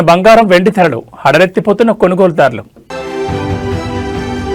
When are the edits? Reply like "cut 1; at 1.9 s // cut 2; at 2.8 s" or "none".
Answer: none